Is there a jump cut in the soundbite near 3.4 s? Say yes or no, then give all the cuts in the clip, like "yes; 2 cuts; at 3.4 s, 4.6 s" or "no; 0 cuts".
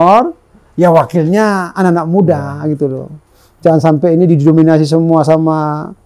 no; 0 cuts